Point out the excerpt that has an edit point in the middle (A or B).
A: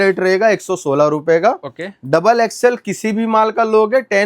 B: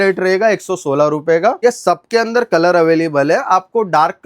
B